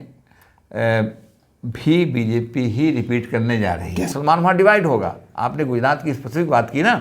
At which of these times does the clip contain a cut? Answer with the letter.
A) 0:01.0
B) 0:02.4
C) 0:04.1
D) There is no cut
C